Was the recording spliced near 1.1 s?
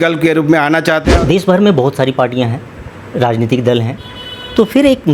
yes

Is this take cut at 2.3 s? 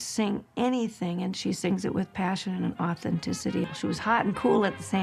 no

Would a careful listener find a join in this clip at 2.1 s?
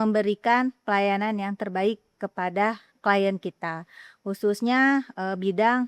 no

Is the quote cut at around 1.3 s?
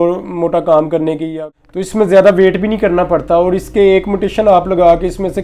yes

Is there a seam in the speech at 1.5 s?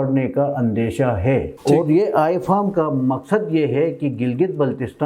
yes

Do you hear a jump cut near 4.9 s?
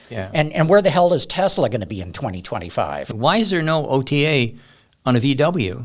no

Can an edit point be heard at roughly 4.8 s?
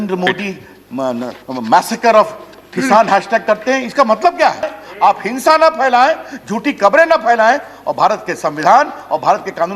yes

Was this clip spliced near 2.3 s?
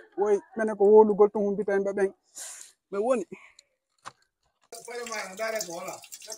no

